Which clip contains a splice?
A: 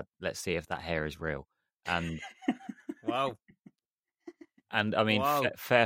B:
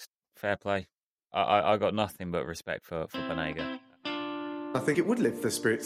B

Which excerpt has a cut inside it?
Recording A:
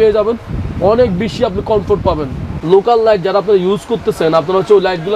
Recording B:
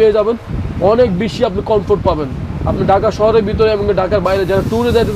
A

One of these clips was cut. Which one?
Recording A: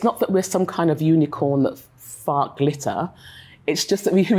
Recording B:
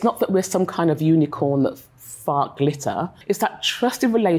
B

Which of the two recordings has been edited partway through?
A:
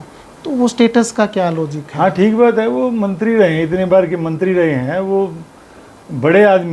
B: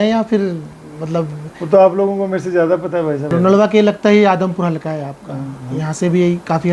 B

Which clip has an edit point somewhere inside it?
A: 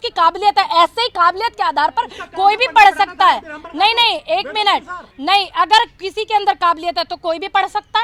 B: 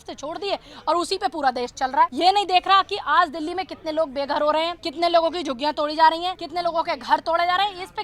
B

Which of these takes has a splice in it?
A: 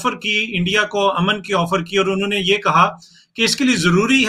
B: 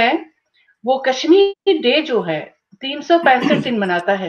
B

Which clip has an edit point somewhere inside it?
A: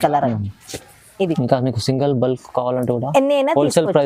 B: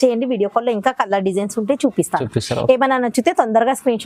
A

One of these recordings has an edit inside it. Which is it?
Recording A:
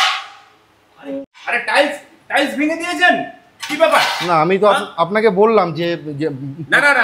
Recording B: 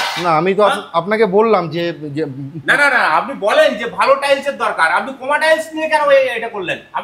A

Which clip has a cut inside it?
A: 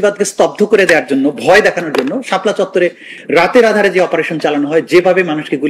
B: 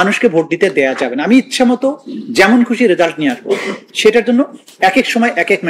A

